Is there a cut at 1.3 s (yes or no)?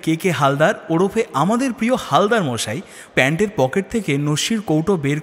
no